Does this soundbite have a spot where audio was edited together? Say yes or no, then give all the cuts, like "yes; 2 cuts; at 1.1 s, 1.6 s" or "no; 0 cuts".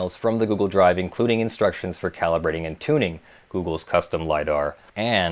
no; 0 cuts